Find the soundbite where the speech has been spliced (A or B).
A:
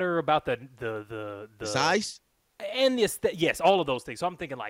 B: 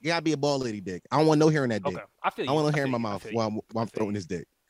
B